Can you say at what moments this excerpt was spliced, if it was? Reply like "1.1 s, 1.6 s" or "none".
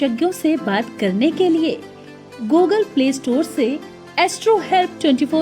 2.6 s